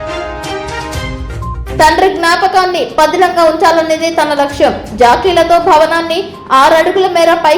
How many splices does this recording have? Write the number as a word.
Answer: one